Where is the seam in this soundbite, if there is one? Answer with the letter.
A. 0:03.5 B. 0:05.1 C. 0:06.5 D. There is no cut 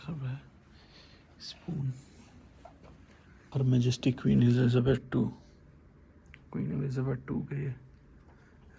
A